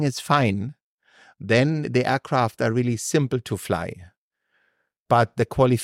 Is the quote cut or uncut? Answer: uncut